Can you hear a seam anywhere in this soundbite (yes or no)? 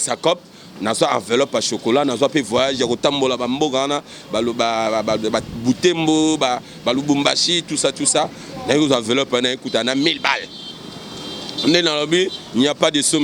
no